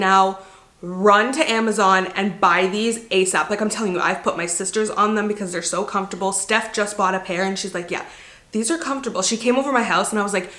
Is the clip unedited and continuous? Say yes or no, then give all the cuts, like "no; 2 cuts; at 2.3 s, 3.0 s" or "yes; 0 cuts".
yes; 0 cuts